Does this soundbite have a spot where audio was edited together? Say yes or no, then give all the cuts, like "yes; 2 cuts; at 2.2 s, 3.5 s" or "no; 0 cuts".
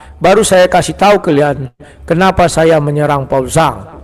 no; 0 cuts